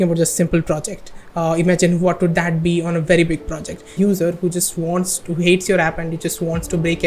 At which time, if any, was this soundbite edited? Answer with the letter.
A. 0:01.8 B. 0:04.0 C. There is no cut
B